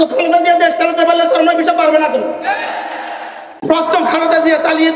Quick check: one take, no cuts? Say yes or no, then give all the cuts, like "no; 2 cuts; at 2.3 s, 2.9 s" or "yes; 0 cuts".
no; 1 cut; at 3.5 s